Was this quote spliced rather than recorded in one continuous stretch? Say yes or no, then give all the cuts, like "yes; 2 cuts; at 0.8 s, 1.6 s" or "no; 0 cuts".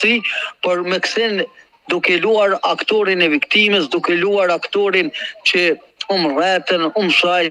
no; 0 cuts